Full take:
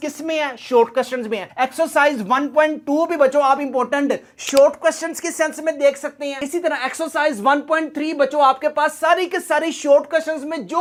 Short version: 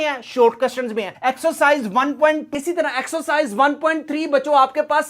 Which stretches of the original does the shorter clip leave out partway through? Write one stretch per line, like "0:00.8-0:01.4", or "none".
0:02.8-0:06.3